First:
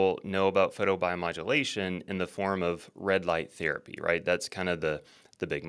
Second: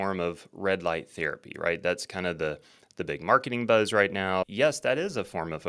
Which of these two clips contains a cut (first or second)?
second